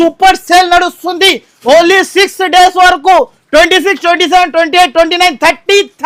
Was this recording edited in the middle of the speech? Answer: no; 0 cuts

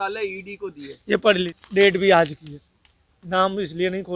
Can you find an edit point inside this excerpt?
yes; 1 cut; at 1.6 s

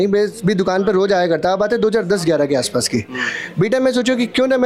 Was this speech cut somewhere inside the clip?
no; 0 cuts

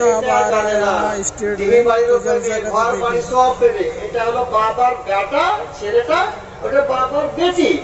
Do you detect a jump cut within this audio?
no; 0 cuts

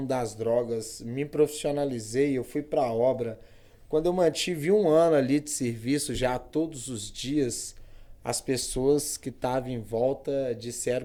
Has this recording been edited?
no; 0 cuts

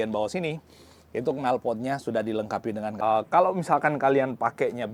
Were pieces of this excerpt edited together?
yes; 1 cut; at 2.9 s

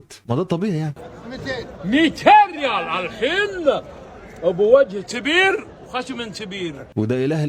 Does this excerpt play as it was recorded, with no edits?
no; 1 cut; at 1.0 s

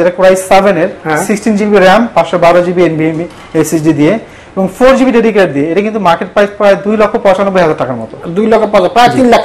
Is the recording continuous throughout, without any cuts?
yes; 0 cuts

